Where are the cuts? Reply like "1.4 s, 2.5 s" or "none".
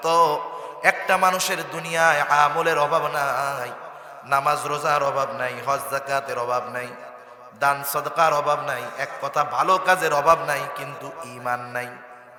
none